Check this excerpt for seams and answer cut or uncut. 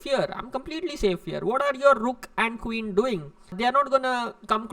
uncut